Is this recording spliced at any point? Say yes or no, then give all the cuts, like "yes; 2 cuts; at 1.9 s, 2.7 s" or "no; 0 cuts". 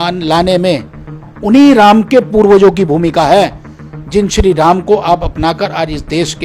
no; 0 cuts